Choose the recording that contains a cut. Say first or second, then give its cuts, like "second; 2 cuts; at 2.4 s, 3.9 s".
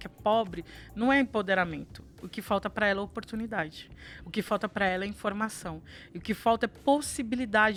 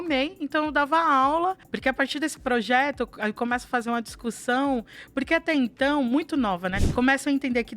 second; 2 cuts; at 1.7 s, 6.8 s